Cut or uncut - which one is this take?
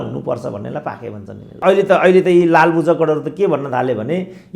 cut